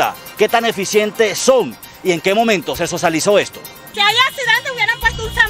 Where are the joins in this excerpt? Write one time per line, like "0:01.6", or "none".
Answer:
0:03.7